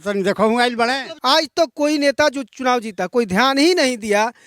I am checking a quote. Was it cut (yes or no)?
yes